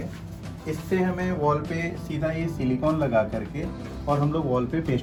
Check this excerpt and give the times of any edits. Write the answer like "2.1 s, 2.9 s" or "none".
none